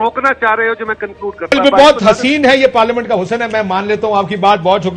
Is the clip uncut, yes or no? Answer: no